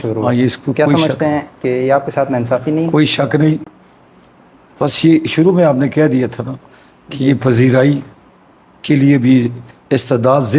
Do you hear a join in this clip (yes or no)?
no